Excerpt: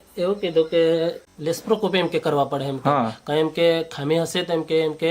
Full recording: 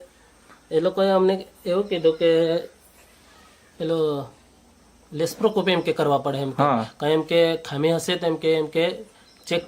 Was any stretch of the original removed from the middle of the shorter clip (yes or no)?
yes